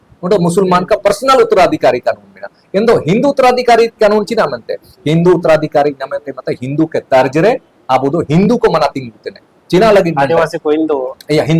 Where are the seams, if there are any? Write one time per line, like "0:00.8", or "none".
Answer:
none

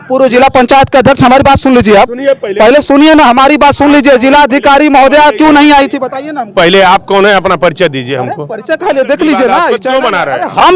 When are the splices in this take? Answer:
0:09.8

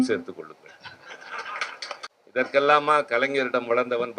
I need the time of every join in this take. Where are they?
0:02.1

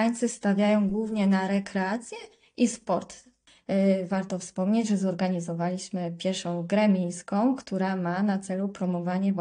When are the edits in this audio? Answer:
0:03.4

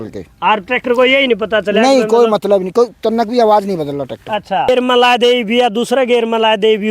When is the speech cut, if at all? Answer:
0:04.7

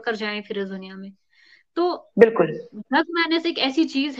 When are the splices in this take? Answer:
none

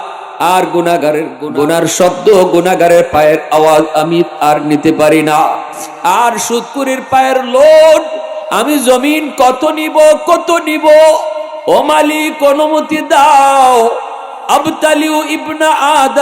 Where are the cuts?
0:01.4

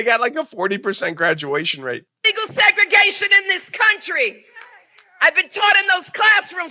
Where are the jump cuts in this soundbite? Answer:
0:02.0

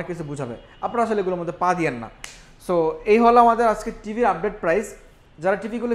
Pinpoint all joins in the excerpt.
none

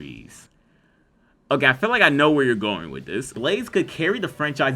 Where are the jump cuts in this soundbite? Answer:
0:03.3

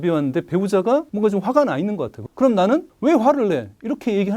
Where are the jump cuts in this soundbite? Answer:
0:01.1
0:02.2
0:02.9

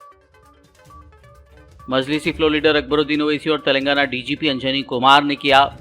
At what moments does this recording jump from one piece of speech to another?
0:01.2

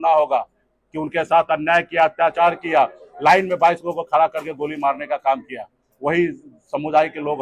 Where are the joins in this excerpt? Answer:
none

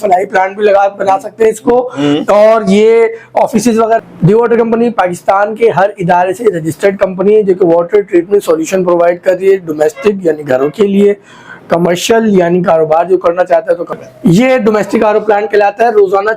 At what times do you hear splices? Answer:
0:04.0
0:13.9

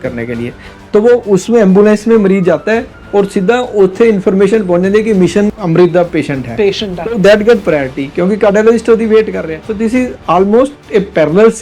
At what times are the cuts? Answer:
0:05.6
0:09.5

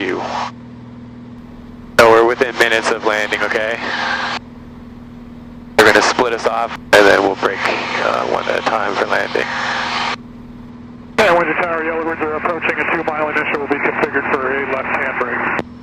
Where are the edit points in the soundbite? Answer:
none

